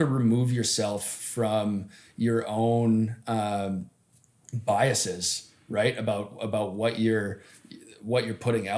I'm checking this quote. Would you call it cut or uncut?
uncut